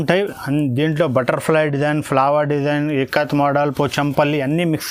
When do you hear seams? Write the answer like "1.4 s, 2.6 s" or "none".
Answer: none